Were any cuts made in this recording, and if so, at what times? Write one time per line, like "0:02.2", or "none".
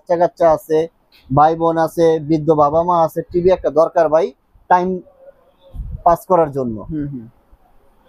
none